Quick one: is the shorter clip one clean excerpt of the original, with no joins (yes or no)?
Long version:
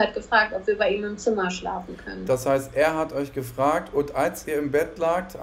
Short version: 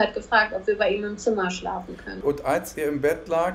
no